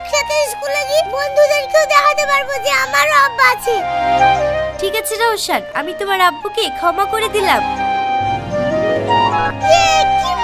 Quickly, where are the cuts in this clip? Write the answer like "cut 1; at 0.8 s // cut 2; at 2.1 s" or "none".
none

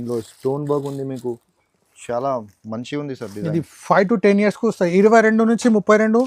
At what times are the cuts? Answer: none

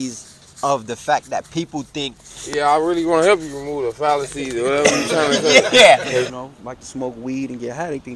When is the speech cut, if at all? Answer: cut 1; at 6.3 s

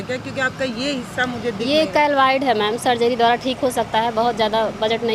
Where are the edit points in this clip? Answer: none

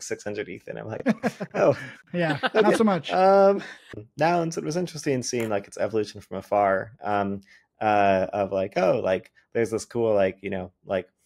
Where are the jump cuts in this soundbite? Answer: cut 1; at 3.9 s

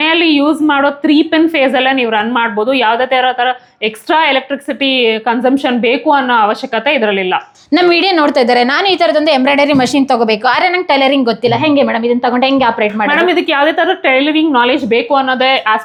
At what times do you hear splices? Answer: none

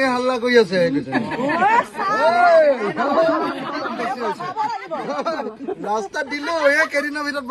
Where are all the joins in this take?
none

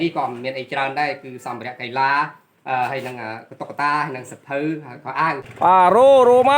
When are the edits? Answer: cut 1; at 5.5 s

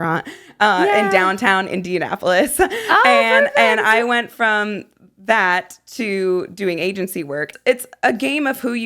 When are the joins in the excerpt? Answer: cut 1; at 7.5 s

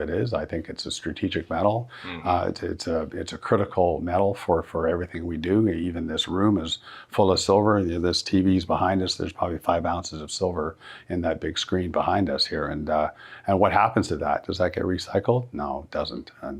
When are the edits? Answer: none

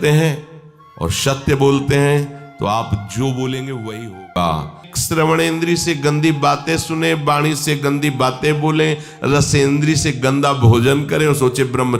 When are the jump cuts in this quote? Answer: cut 1; at 4.9 s

